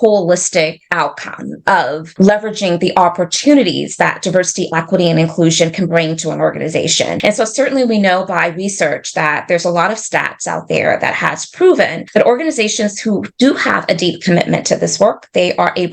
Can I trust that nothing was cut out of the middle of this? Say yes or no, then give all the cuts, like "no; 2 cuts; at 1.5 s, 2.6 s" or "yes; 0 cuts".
no; 3 cuts; at 2.0 s, 7.2 s, 12.0 s